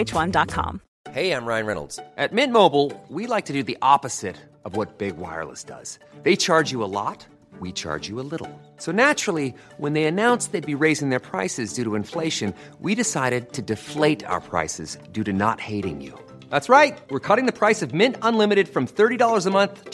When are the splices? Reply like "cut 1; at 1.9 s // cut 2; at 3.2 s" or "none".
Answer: none